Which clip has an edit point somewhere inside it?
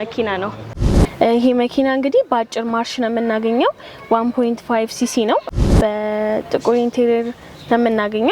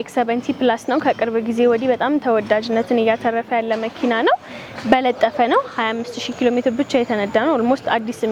first; 2 cuts; at 0.8 s, 5.7 s

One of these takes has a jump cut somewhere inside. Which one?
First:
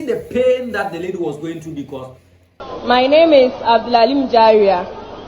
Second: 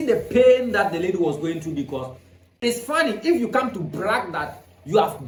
first; 1 cut; at 2.5 s

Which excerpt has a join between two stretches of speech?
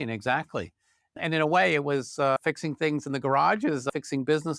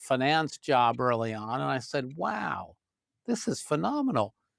first; 3 cuts; at 1.1 s, 2.4 s, 3.9 s

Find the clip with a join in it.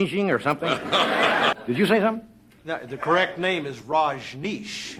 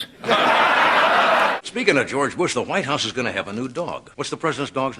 second; 2 cuts; at 1.6 s, 4.1 s

